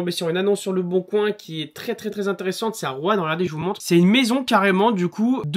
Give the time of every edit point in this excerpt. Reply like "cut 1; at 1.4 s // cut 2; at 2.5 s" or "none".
none